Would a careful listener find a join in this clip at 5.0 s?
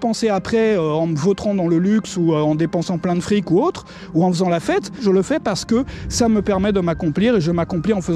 yes; 1 cut; at 5.0 s

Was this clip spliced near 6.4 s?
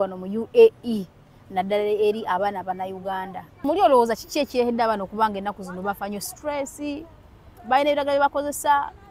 no; 1 cut; at 3.5 s

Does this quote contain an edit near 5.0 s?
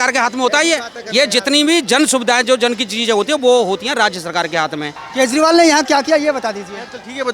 yes; 1 cut; at 5.0 s

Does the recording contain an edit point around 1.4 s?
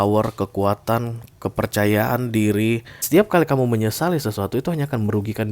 no; 1 cut; at 3.0 s

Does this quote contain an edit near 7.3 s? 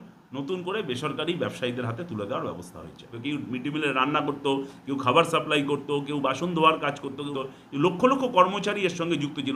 yes; 2 cuts; at 3.2 s, 7.3 s

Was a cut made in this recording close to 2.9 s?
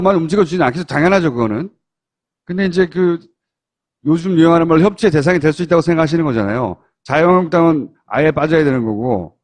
yes; 1 cut; at 2.9 s

